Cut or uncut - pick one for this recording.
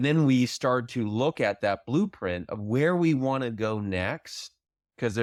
uncut